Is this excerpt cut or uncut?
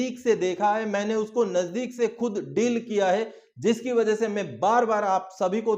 uncut